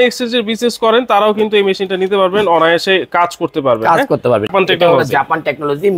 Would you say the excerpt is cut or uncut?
cut